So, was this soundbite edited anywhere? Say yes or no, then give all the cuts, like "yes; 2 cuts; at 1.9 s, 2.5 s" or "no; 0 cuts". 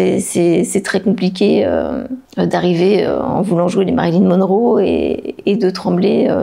no; 0 cuts